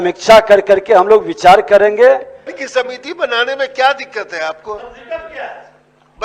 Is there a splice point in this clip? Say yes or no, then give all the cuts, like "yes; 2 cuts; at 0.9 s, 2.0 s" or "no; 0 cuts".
yes; 1 cut; at 2.5 s